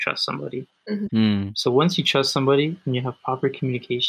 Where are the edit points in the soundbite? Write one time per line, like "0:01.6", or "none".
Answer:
none